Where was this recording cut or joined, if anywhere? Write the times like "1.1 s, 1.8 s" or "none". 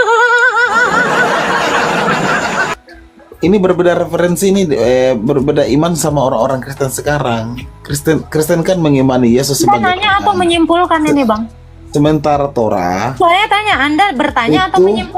2.7 s

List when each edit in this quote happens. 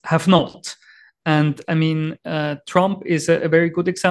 none

